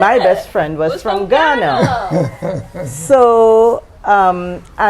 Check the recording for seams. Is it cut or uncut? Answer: uncut